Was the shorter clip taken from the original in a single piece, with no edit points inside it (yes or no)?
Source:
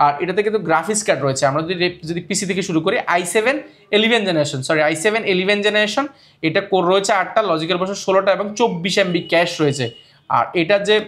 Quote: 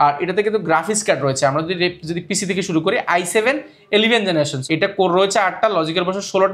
no